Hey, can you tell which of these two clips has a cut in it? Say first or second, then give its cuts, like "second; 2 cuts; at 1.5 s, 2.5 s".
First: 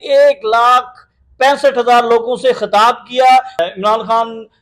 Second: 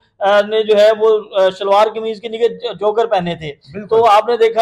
first; 1 cut; at 3.6 s